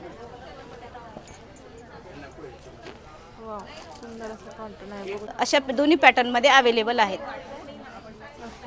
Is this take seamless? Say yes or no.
no